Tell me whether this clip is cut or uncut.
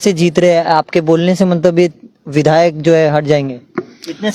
uncut